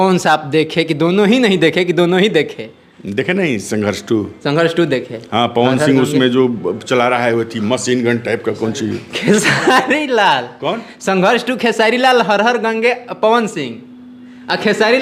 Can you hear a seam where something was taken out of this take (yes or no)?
no